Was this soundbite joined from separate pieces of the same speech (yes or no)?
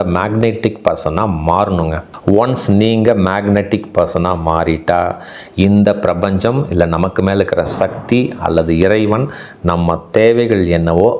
yes